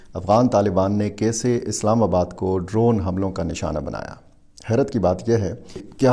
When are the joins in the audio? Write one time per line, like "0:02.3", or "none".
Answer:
none